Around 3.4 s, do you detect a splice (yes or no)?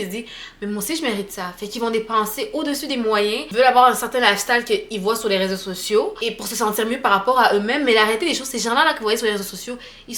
yes